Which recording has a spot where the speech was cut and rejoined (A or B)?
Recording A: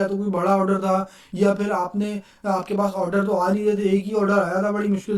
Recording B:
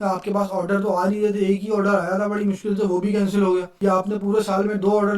B